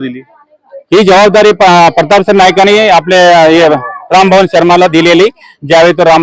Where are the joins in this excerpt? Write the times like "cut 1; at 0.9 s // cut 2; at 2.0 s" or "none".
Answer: none